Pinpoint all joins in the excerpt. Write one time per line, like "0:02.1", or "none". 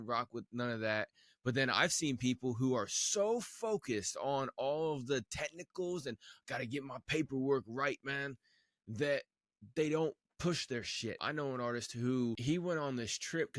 0:11.2
0:12.4